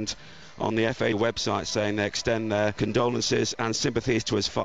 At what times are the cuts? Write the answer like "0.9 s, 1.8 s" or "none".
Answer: none